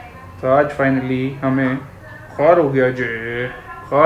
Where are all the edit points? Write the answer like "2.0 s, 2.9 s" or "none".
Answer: none